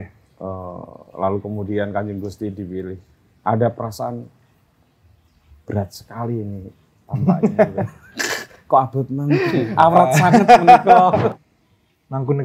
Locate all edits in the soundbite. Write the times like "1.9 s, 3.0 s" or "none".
11.3 s